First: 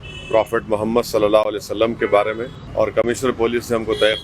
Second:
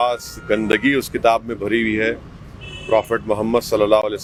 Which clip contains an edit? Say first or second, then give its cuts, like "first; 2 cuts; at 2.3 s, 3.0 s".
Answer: first; 1 cut; at 2.6 s